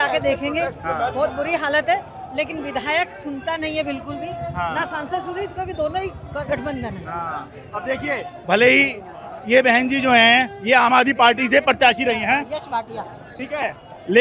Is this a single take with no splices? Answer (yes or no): yes